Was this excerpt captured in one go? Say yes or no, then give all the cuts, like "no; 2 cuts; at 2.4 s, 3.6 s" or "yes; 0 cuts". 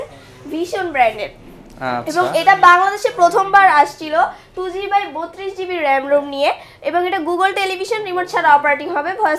yes; 0 cuts